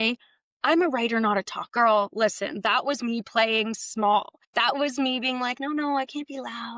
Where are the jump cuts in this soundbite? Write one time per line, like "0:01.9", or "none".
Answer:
0:01.6
0:04.4